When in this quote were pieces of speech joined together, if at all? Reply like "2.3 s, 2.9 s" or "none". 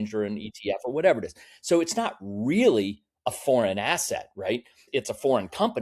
none